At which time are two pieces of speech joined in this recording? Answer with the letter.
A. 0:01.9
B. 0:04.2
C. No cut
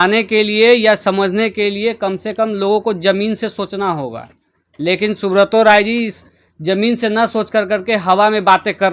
C